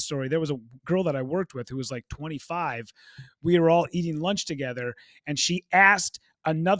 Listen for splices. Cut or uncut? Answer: uncut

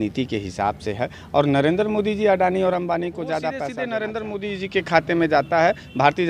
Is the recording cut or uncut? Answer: cut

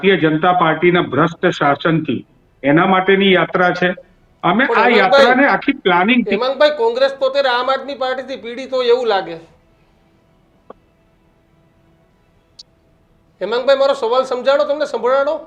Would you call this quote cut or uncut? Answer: uncut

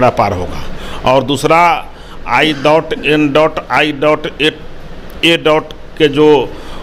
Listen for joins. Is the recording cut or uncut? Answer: uncut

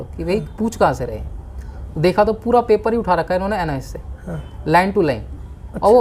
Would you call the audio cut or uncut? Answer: uncut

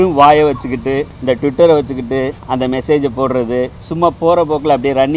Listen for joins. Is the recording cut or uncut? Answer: cut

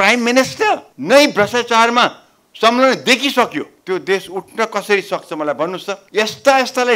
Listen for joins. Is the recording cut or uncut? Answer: cut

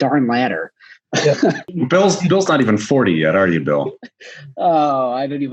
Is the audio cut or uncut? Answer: cut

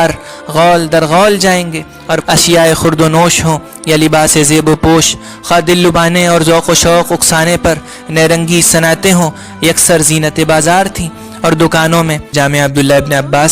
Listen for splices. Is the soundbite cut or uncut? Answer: cut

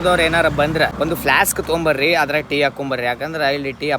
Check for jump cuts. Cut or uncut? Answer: cut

